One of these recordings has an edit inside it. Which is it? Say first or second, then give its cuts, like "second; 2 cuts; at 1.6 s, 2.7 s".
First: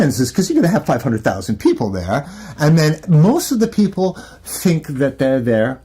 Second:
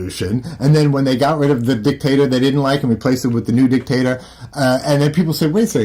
first; 1 cut; at 3.0 s